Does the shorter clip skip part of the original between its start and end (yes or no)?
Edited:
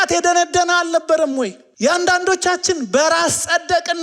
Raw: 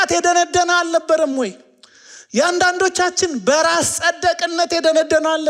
yes